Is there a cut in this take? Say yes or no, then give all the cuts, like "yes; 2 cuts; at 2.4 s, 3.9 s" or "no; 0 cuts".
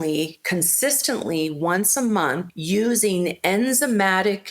yes; 1 cut; at 2.5 s